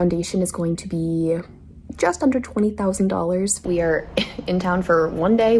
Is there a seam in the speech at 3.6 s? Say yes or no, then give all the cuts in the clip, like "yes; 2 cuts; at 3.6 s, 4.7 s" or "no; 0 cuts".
yes; 1 cut; at 3.6 s